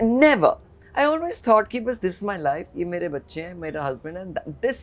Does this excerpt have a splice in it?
no; 0 cuts

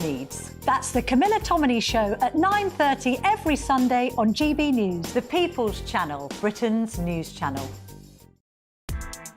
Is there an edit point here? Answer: yes; 1 cut; at 8.5 s

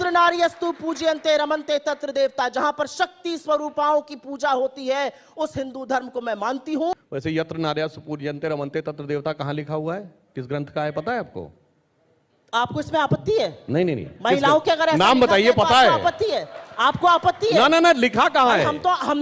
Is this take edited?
yes; 1 cut; at 6.9 s

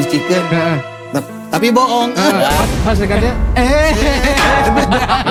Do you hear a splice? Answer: no; 0 cuts

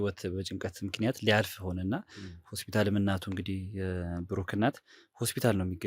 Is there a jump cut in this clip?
no; 0 cuts

